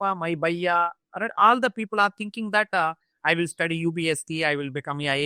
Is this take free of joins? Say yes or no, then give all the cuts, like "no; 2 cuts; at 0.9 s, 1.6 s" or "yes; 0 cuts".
yes; 0 cuts